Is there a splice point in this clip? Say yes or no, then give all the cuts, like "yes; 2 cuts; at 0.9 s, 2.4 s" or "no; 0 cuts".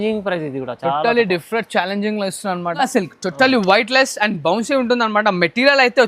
yes; 1 cut; at 2.8 s